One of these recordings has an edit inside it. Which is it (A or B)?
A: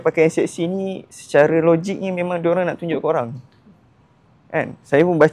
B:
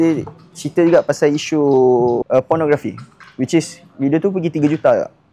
B